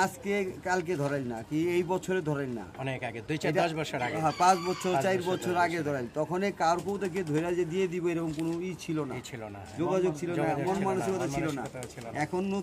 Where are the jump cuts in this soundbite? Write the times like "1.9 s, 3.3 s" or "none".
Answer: none